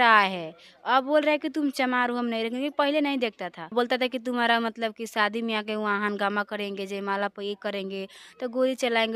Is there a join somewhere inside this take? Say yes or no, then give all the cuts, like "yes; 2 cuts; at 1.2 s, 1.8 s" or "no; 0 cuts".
yes; 1 cut; at 3.7 s